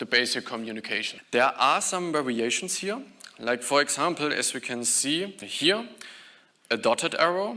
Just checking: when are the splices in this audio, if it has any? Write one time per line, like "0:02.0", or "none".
0:01.1
0:05.5